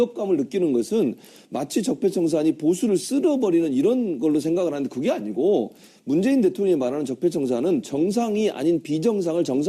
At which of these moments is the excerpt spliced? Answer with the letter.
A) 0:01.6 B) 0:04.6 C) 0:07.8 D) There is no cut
D